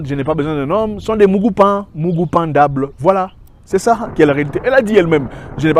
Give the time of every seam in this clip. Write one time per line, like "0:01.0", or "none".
none